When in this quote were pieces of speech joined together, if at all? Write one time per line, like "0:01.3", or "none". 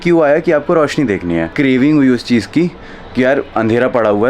0:01.5